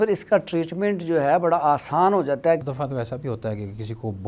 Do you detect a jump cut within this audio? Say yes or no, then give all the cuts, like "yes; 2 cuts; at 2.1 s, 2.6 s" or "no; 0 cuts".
yes; 1 cut; at 2.7 s